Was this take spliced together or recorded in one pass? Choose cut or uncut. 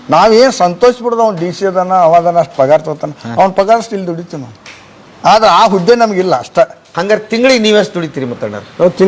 cut